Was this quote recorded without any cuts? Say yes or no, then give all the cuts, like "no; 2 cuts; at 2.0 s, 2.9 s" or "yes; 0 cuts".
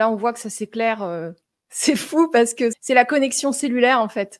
no; 1 cut; at 2.7 s